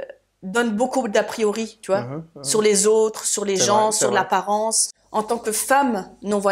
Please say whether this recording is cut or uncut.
cut